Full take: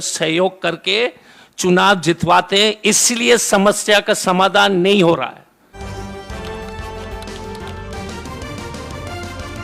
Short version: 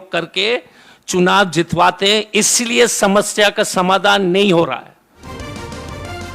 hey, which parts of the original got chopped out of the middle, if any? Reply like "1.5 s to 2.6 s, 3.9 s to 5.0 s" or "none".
5.7 s to 8.2 s

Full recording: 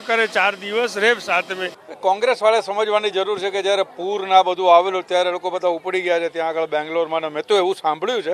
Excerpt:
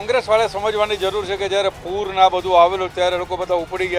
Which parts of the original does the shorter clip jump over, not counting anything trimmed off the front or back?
none

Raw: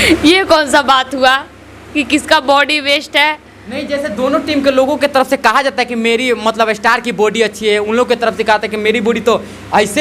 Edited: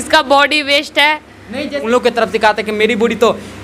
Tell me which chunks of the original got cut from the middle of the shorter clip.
4.0 s to 7.9 s

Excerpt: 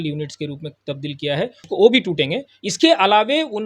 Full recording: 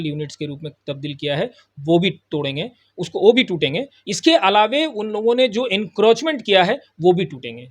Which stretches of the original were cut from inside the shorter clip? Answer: 1.6 s to 3.0 s

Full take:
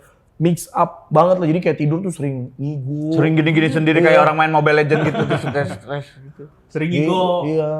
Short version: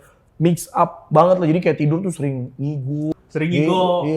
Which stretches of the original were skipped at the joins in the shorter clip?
3.1 s to 6.5 s

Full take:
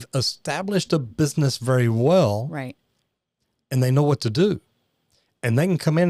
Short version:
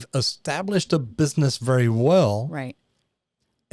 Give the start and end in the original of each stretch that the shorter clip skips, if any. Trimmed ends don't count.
none

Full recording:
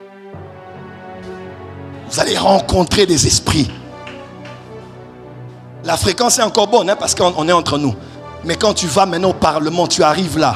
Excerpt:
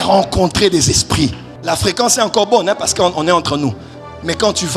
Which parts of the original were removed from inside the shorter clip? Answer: 3.8 s to 5.7 s

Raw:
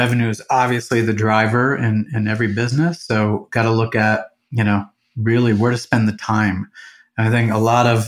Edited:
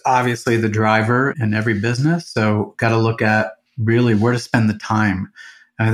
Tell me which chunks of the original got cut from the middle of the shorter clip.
1.8 s to 2.1 s, 4.4 s to 5.0 s

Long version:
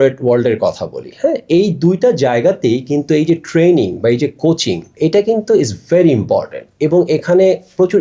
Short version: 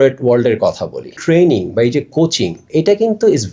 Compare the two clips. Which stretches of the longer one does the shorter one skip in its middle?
1.2 s to 3.4 s

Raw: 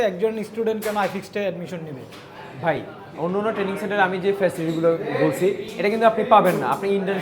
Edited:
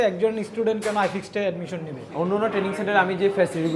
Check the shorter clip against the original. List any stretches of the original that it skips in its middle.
2.0 s to 3.0 s

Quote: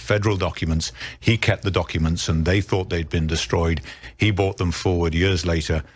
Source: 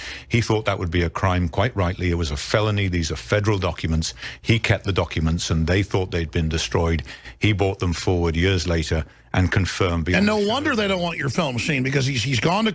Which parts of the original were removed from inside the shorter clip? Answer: none

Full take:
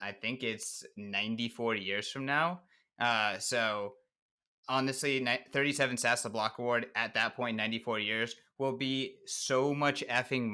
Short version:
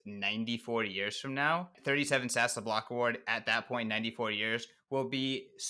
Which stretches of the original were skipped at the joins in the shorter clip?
2.7 s to 5.4 s

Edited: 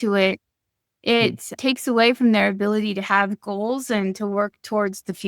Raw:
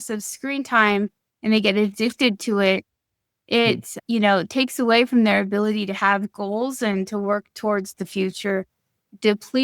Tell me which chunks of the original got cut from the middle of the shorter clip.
4.0 s to 4.5 s

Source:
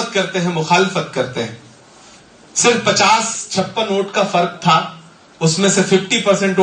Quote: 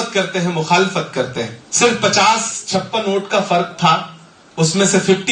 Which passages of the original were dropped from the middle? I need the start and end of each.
1.6 s to 2.4 s

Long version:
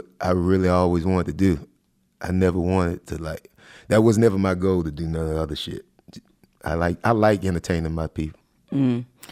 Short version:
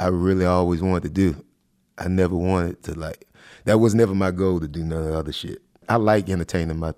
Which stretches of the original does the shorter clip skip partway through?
6.1 s to 7.0 s

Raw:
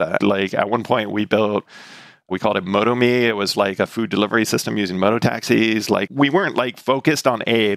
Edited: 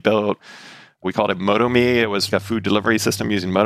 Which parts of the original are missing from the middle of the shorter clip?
3.5 s to 3.7 s

